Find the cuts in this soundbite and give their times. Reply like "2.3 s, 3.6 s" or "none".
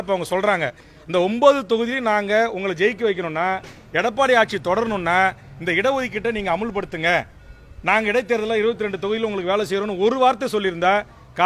none